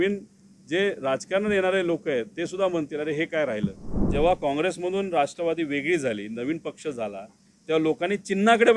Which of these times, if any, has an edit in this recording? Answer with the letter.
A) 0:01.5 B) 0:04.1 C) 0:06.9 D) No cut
B